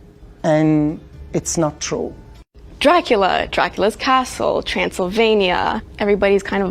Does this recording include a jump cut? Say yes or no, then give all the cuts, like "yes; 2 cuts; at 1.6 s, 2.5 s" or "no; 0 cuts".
yes; 1 cut; at 2.5 s